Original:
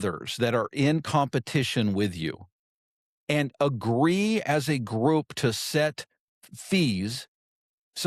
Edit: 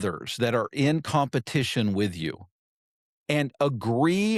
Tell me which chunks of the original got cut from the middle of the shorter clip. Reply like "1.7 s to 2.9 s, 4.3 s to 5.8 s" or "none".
none